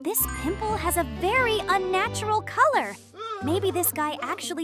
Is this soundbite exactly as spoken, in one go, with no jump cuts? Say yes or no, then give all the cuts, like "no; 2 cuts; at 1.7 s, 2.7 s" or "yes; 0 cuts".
yes; 0 cuts